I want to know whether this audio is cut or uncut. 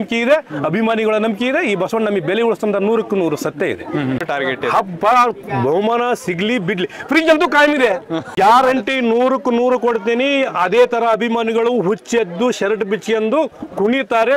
cut